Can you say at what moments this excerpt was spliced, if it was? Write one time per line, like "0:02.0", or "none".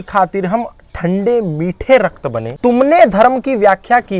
0:02.5